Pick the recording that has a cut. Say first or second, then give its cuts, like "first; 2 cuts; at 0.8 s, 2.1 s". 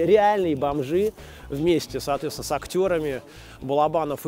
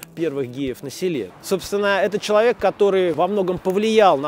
second; 2 cuts; at 1.3 s, 3.1 s